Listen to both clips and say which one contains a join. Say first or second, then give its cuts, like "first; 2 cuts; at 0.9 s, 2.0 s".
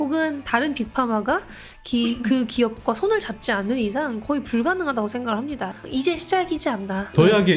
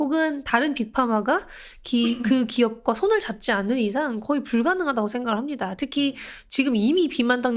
first; 1 cut; at 5.8 s